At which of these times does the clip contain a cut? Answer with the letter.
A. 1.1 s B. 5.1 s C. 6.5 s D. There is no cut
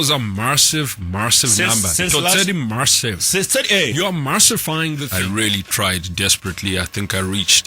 B